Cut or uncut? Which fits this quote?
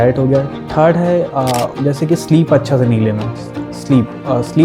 cut